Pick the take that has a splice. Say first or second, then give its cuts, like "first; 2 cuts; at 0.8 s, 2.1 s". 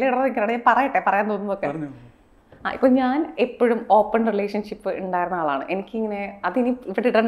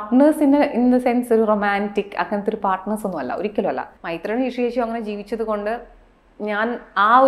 second; 1 cut; at 3.9 s